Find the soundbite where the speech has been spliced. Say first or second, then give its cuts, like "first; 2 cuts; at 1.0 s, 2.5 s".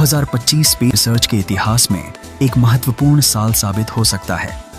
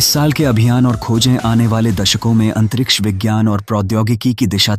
first; 1 cut; at 2.2 s